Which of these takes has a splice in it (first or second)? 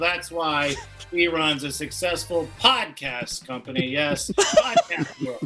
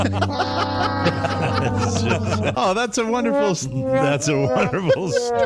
second